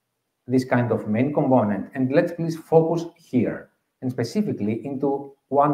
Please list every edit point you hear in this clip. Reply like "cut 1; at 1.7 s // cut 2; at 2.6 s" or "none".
none